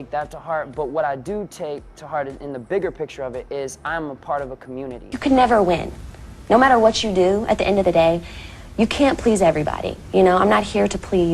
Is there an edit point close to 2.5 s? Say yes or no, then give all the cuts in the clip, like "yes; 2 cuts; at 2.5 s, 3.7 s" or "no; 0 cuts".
no; 1 cut; at 5.0 s